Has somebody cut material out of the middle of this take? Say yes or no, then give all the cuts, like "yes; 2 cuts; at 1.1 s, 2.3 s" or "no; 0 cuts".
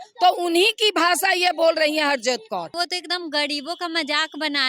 yes; 1 cut; at 2.8 s